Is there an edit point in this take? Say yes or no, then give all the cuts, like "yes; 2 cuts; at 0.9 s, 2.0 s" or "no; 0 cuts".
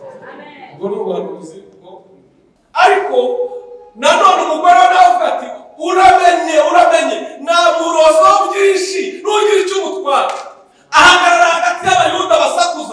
yes; 1 cut; at 2.5 s